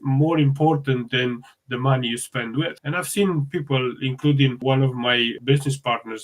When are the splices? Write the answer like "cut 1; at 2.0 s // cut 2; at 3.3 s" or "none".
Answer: none